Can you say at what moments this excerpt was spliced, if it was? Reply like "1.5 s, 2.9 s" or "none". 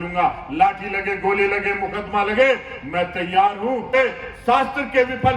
3.9 s